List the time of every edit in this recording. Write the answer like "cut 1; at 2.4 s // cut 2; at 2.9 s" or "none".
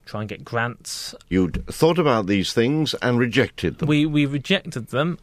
cut 1; at 1.3 s